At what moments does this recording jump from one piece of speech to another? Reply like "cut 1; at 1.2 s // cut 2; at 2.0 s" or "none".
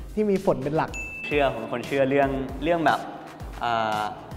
cut 1; at 1.2 s

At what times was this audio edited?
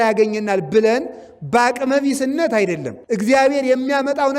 cut 1; at 2.9 s

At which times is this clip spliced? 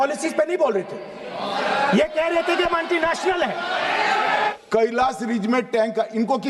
cut 1; at 4.5 s

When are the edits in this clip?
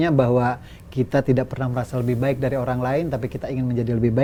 none

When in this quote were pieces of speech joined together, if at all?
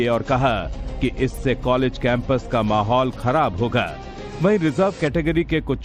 none

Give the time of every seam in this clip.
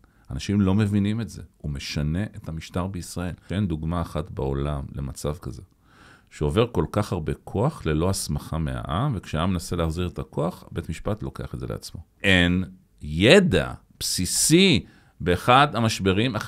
cut 1; at 3.4 s // cut 2; at 12.1 s

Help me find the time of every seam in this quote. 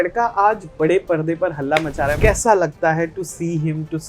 cut 1; at 2.2 s

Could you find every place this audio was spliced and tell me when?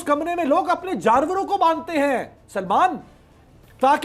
none

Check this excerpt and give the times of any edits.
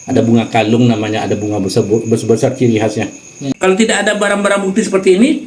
cut 1; at 3.5 s

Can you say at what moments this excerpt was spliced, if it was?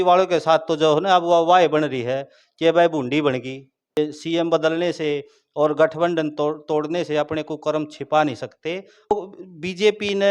cut 1; at 3.8 s // cut 2; at 9.1 s

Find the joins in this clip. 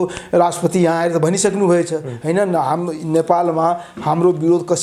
none

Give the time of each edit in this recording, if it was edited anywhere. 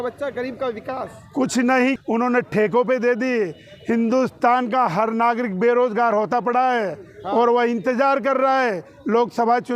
cut 1; at 2.0 s

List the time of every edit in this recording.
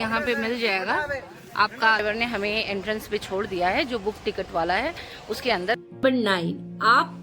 cut 1; at 2.0 s // cut 2; at 5.8 s

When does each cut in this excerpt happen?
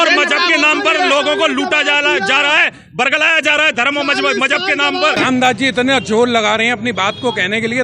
cut 1; at 5.2 s

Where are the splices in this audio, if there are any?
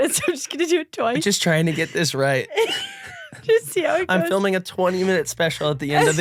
none

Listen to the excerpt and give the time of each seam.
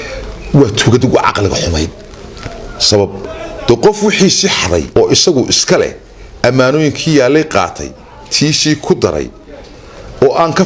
cut 1; at 4.9 s

